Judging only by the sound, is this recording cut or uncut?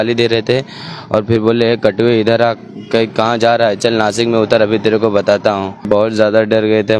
cut